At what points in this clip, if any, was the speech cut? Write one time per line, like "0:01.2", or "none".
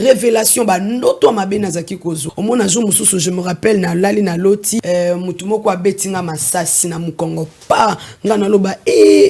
0:02.2
0:04.8
0:06.8